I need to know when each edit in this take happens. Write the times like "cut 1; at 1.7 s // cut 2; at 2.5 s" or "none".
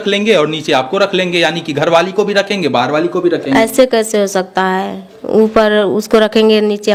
none